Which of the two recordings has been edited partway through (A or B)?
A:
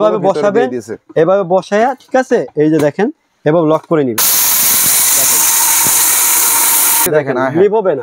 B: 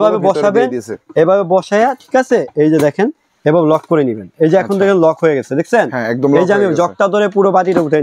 A